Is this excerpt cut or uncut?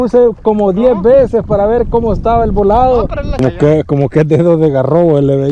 cut